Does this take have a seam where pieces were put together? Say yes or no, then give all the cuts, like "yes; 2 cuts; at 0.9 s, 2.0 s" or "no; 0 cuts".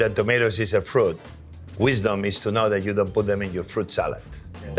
no; 0 cuts